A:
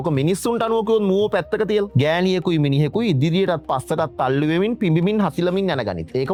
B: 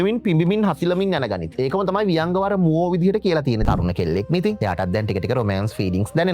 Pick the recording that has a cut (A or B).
B